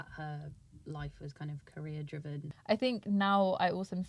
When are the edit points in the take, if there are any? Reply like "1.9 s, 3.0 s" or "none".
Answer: 2.5 s